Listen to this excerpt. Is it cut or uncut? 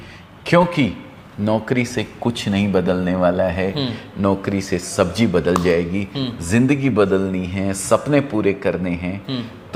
uncut